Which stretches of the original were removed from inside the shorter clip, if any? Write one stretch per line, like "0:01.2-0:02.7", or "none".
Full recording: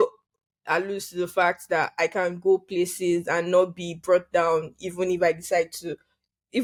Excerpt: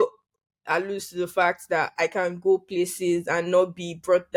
none